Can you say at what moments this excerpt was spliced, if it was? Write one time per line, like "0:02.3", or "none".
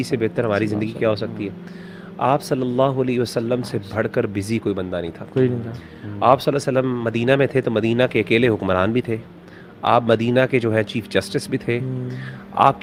none